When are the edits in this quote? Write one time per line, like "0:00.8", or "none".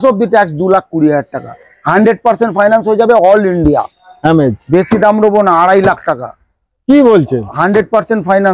0:04.1